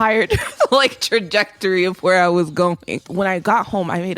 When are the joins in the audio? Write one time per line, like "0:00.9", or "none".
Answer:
0:03.0

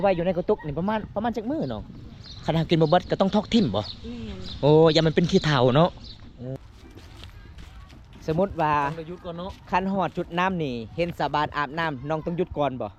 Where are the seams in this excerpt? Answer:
0:06.6

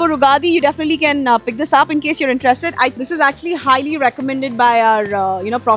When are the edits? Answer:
0:02.9

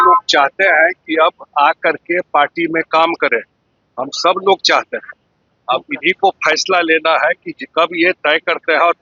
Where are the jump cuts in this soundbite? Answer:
none

